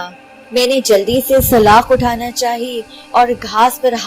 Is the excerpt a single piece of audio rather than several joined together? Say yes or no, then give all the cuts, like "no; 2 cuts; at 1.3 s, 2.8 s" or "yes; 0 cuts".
yes; 0 cuts